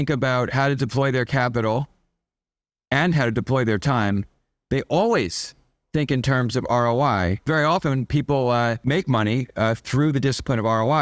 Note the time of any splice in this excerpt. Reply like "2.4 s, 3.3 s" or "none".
7.4 s, 8.8 s